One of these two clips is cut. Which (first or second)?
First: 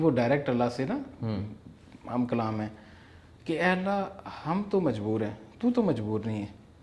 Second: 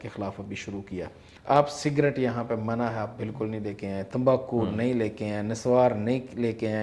second